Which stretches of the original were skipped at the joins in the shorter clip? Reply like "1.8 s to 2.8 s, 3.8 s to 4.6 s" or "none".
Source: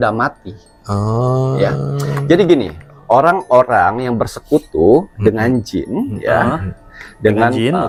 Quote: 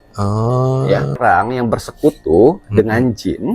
1.9 s to 3.7 s